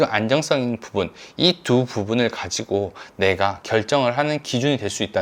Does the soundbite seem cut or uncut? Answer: uncut